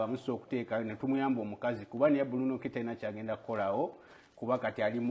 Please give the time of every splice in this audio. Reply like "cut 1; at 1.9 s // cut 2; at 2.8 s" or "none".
none